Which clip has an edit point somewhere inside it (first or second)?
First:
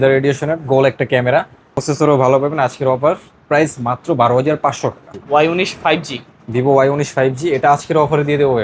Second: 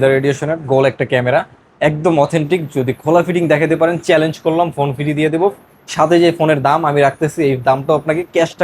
first